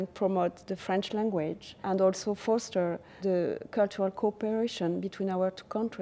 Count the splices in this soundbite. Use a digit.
2